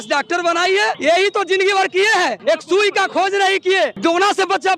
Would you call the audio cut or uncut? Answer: cut